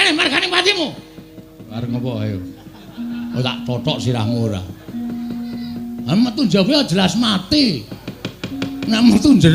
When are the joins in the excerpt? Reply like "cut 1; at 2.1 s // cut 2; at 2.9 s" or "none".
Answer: cut 1; at 1.7 s